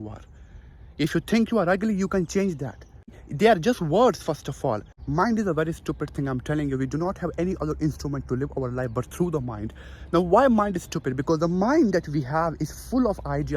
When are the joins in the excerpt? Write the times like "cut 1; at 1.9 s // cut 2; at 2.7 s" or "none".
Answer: cut 1; at 3.2 s // cut 2; at 4.9 s